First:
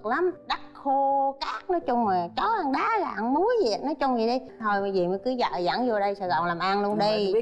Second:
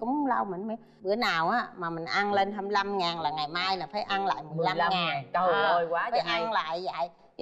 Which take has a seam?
first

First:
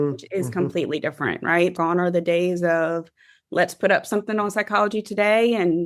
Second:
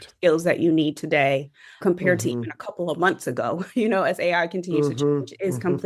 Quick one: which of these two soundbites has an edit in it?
first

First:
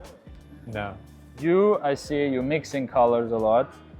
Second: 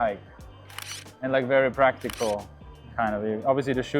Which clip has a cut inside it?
first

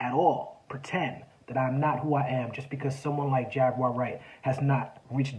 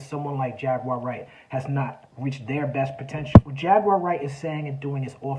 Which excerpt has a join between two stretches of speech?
second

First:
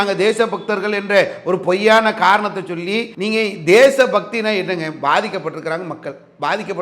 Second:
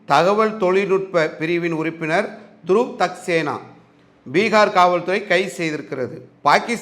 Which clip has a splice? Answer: first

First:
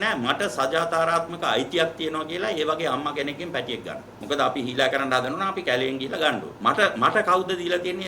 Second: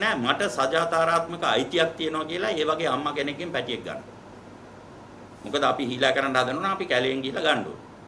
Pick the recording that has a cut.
first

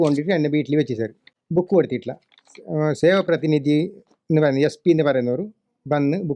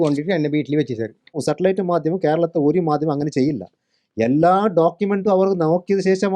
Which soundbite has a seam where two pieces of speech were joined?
second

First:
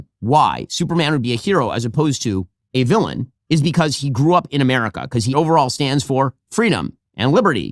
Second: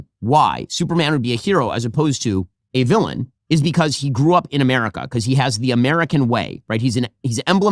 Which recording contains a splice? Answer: first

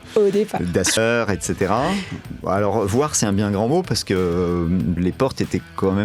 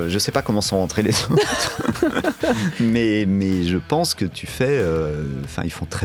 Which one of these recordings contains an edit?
first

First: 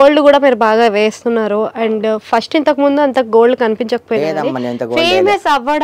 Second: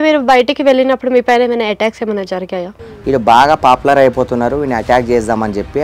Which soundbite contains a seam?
second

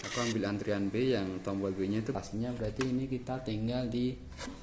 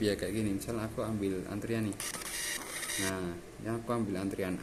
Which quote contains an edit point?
first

